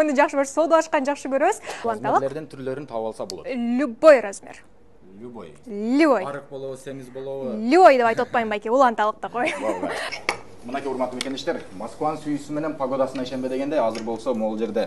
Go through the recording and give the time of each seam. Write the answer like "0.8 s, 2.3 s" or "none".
1.7 s, 10.1 s